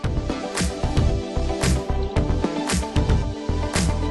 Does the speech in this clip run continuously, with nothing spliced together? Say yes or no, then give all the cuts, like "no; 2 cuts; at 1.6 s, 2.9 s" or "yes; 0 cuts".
yes; 0 cuts